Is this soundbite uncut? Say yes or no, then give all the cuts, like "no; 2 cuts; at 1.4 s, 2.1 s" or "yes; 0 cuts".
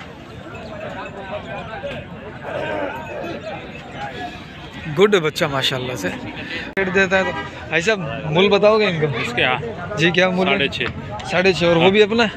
no; 1 cut; at 6.8 s